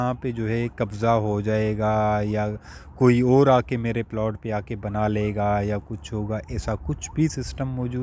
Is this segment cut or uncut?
uncut